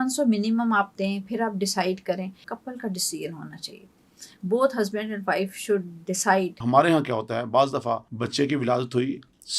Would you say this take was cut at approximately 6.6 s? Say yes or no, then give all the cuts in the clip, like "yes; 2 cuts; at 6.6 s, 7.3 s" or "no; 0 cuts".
yes; 3 cuts; at 2.5 s, 6.6 s, 8.1 s